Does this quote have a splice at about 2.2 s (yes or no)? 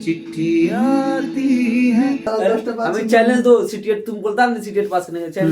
yes